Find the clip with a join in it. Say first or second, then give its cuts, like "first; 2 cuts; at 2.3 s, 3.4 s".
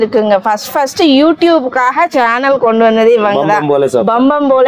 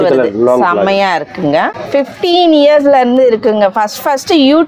second; 1 cut; at 1.8 s